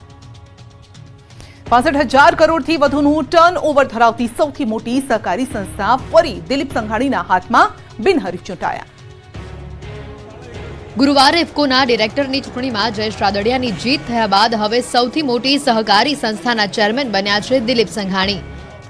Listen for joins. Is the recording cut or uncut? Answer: cut